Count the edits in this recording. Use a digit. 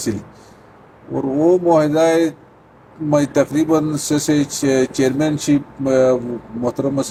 0